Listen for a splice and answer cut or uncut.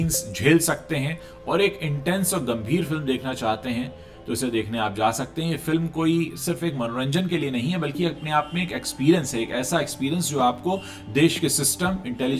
uncut